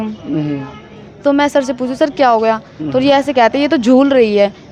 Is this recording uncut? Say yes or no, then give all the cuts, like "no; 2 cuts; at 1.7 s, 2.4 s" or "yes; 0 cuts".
yes; 0 cuts